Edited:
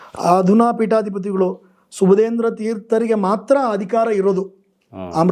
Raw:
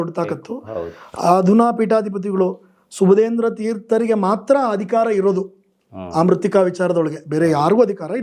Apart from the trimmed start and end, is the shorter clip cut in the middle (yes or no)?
no